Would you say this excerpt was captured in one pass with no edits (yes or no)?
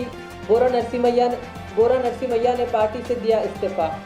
yes